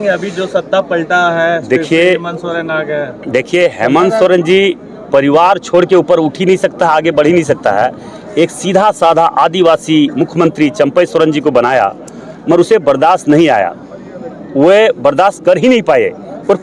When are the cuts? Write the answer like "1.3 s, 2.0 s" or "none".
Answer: none